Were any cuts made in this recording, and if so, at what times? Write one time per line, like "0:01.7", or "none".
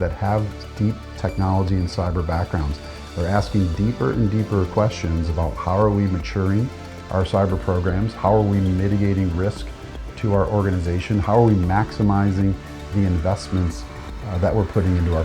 none